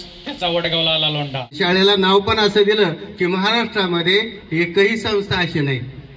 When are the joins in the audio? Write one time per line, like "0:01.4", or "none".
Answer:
0:01.5